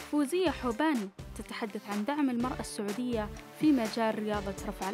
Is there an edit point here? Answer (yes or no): no